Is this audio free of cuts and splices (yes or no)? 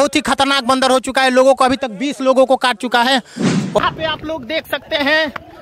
no